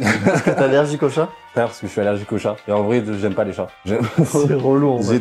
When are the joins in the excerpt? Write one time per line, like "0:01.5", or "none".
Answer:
none